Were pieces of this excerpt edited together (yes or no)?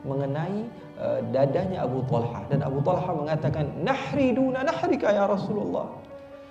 no